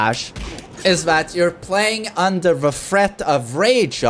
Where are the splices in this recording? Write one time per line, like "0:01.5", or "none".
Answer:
none